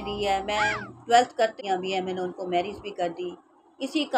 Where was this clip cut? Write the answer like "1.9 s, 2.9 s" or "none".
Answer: 1.5 s